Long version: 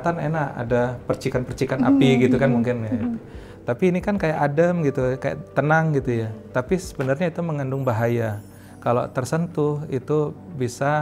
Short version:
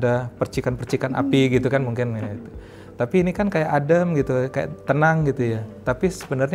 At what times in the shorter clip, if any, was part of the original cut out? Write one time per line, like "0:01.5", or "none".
none